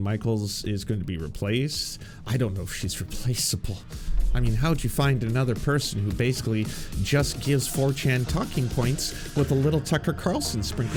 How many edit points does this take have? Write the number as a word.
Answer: zero